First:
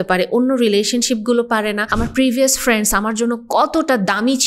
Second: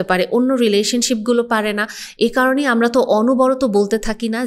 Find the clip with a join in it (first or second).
first